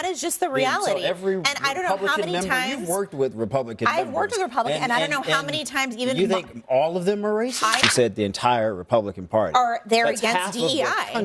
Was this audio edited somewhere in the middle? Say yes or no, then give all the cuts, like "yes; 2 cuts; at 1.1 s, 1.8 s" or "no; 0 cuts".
yes; 1 cut; at 7.8 s